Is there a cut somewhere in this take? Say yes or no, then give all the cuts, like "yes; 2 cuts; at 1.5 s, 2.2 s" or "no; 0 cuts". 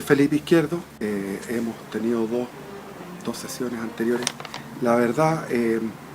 yes; 1 cut; at 0.9 s